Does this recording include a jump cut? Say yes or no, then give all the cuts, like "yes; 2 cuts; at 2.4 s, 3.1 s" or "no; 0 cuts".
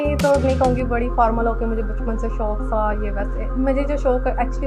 no; 0 cuts